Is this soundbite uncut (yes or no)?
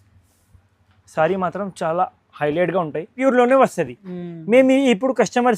no